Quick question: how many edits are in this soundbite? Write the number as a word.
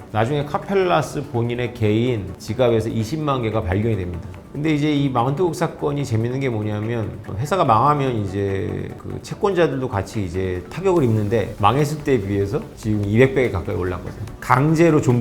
two